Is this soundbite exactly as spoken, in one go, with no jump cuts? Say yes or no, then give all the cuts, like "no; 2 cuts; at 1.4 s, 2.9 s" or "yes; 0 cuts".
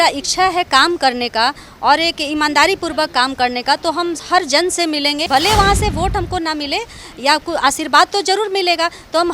no; 1 cut; at 5.2 s